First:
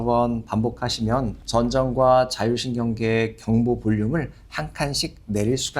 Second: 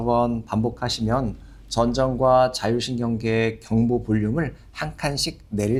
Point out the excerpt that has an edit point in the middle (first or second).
first